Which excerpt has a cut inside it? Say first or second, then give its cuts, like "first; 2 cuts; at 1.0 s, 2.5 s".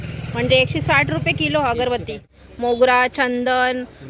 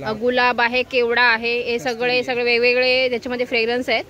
first; 1 cut; at 2.4 s